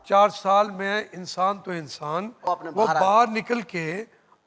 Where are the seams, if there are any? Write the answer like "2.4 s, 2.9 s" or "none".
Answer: 2.4 s